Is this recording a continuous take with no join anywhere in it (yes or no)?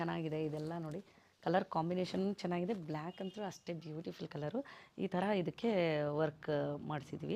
yes